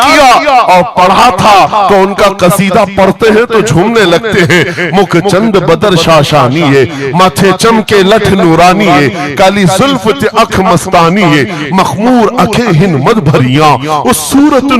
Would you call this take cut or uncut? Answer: uncut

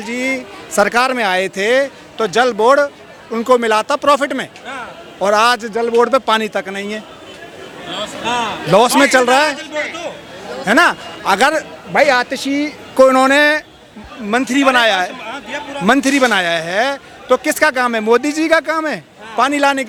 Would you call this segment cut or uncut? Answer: uncut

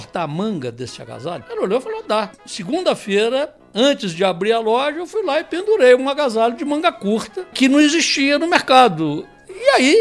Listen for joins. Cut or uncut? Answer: cut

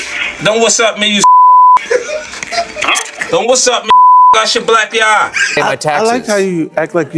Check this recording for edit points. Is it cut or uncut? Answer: cut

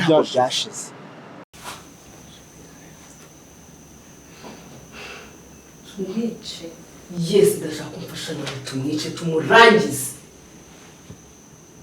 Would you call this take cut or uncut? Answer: cut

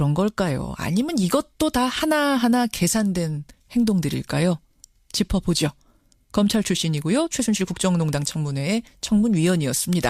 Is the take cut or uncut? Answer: uncut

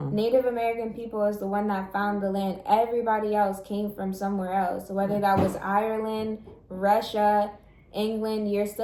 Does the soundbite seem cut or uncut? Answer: uncut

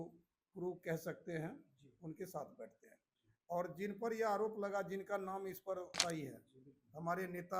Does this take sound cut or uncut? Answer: cut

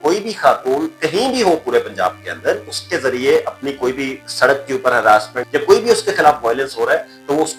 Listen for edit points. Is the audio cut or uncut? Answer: cut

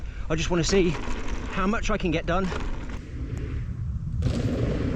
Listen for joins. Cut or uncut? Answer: uncut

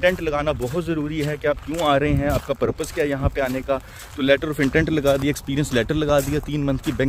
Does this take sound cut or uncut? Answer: uncut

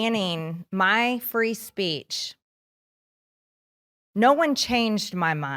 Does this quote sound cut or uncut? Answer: uncut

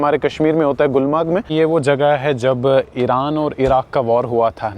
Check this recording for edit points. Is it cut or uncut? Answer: cut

